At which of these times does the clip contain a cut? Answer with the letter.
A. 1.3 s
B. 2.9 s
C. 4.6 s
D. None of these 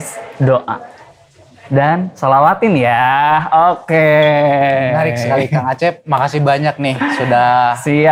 D